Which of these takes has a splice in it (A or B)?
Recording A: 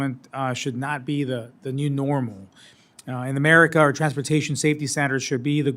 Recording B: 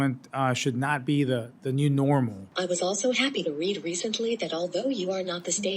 B